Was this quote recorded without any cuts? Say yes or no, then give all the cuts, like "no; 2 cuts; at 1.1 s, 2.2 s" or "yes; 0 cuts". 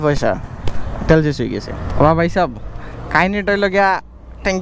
no; 1 cut; at 1.8 s